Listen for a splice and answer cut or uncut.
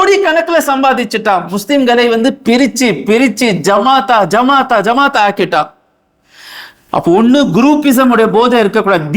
uncut